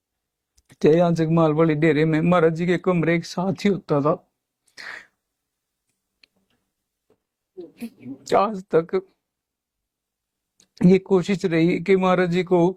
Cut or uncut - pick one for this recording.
uncut